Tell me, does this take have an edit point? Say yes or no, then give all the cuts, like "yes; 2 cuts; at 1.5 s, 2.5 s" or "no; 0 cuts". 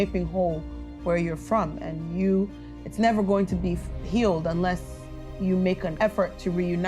yes; 1 cut; at 5.9 s